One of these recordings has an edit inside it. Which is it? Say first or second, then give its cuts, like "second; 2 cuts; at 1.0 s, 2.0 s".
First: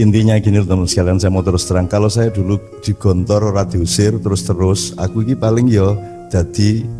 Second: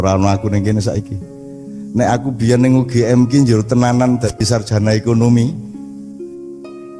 second; 1 cut; at 5.6 s